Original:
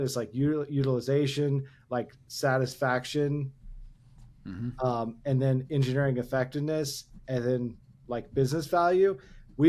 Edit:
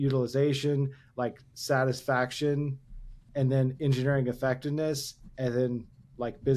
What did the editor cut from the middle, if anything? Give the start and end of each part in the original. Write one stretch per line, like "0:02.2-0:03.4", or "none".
0:04.0-0:05.2

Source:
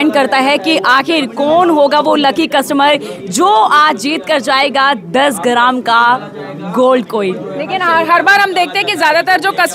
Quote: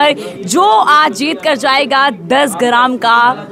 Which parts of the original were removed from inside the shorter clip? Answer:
none

